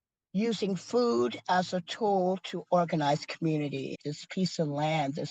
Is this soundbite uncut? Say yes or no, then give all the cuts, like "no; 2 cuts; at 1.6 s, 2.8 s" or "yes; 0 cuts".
no; 1 cut; at 4.0 s